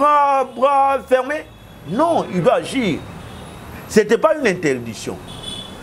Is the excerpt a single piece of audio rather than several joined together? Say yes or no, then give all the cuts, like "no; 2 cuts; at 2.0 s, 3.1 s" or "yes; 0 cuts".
yes; 0 cuts